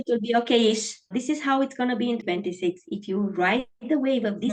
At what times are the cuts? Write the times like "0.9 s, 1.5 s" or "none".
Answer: 1.1 s, 2.2 s